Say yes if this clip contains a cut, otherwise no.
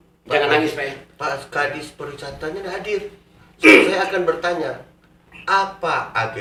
no